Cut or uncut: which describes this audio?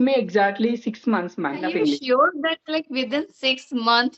cut